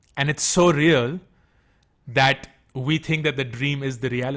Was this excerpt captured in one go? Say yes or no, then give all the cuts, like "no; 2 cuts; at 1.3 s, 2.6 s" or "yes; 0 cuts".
yes; 0 cuts